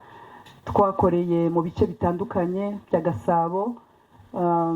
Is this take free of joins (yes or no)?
yes